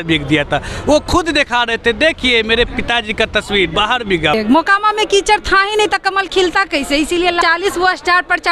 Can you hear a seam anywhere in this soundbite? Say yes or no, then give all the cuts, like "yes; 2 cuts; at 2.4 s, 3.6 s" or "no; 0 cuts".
yes; 2 cuts; at 4.3 s, 7.4 s